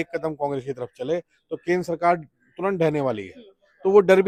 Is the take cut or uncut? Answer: uncut